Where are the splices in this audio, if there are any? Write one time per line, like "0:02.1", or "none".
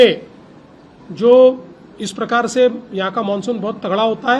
none